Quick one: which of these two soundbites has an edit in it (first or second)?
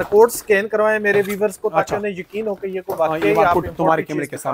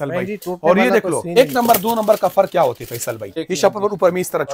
second